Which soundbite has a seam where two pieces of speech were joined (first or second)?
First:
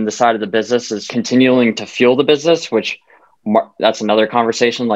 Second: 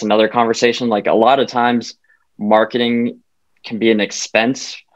first